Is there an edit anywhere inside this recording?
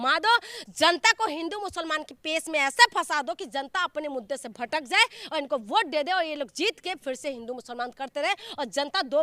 no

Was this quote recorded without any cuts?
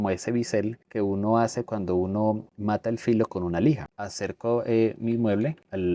no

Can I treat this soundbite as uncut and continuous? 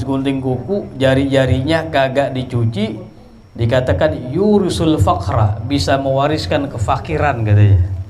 yes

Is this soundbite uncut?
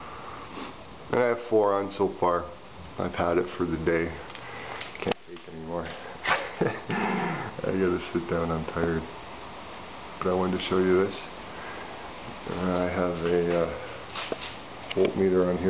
yes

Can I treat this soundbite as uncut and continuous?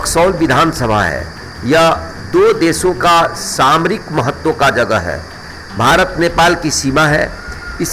yes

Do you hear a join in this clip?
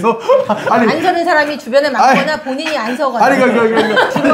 no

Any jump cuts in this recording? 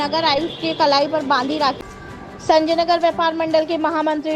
yes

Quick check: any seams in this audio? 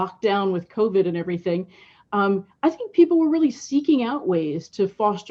no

